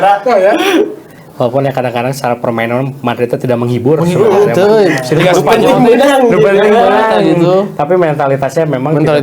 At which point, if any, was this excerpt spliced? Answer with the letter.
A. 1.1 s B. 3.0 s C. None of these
A